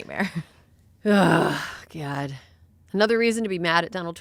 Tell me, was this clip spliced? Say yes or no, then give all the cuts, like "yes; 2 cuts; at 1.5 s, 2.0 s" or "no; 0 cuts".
no; 0 cuts